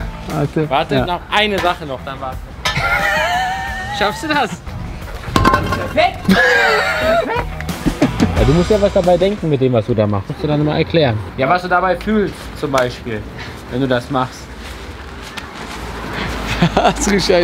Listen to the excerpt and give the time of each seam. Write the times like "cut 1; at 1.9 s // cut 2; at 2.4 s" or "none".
cut 1; at 4.6 s // cut 2; at 8.3 s